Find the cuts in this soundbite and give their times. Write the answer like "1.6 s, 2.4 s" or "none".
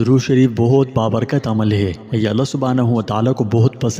2.0 s